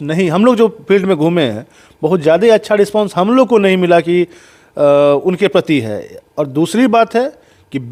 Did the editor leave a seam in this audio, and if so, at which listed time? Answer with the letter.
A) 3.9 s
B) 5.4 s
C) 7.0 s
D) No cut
D